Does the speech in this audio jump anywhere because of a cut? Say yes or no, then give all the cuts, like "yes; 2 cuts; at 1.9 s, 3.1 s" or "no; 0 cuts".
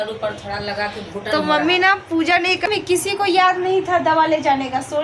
yes; 1 cut; at 2.6 s